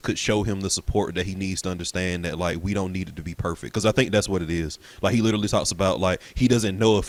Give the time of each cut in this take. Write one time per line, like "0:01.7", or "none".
none